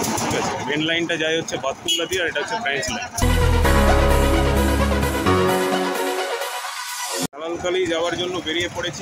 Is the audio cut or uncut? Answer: uncut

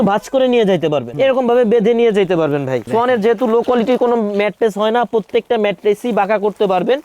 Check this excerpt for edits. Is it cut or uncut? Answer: cut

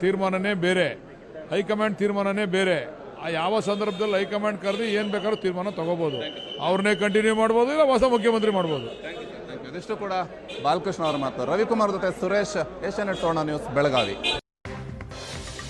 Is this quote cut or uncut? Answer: cut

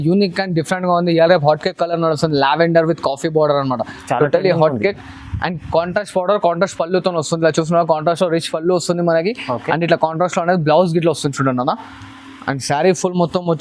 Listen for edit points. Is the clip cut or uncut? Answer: uncut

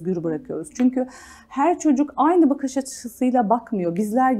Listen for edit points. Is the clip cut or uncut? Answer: uncut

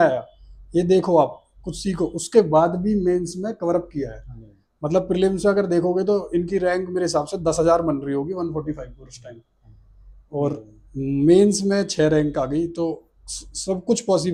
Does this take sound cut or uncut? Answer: uncut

